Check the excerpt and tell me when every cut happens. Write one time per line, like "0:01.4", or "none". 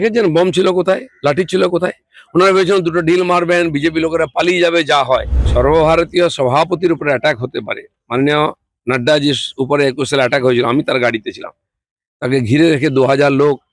0:05.4